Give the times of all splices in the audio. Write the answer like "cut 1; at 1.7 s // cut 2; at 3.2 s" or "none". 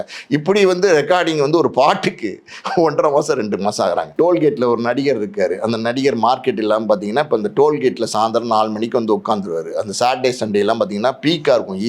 cut 1; at 4.1 s